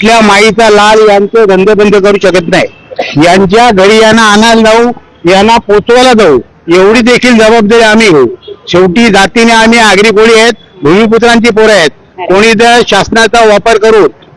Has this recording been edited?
no; 0 cuts

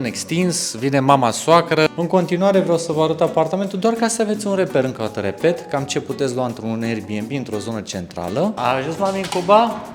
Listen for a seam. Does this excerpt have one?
yes; 2 cuts; at 1.9 s, 8.6 s

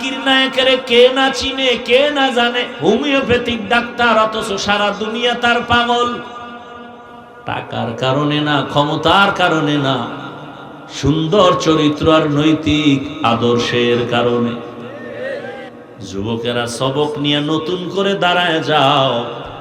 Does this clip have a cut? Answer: yes; 1 cut; at 15.7 s

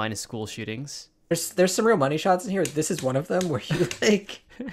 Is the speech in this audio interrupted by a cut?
yes; 1 cut; at 1.3 s

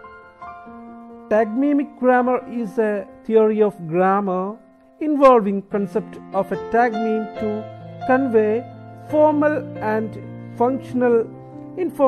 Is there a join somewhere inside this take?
no; 0 cuts

